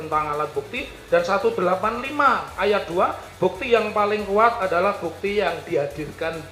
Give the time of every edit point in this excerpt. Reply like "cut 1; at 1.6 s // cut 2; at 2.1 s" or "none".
none

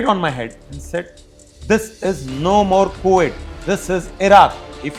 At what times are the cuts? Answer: none

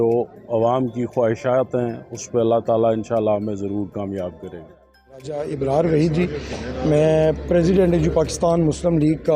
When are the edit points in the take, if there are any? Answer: cut 1; at 5.4 s

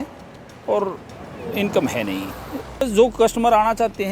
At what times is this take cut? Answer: cut 1; at 2.8 s

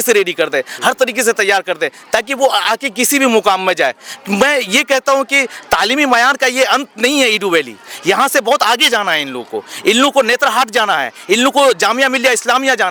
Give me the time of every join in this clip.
none

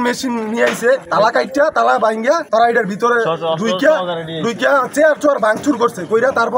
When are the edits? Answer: cut 1; at 1.1 s // cut 2; at 2.4 s

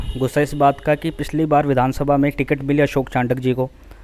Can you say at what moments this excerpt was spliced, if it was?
none

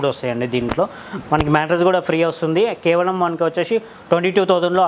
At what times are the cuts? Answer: none

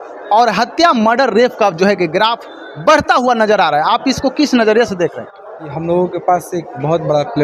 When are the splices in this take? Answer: cut 1; at 5.7 s

